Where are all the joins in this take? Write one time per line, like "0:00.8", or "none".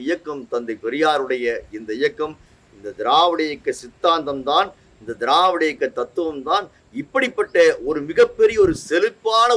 none